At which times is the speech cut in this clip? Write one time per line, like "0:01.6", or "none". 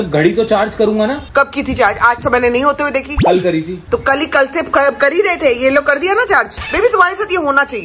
none